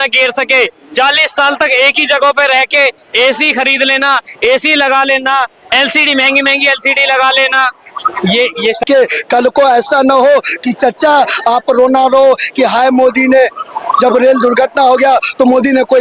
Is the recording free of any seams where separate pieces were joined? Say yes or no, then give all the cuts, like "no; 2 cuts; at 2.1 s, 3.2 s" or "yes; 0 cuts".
no; 1 cut; at 8.8 s